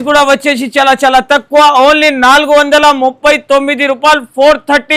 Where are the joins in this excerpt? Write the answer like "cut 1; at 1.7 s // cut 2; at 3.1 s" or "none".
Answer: none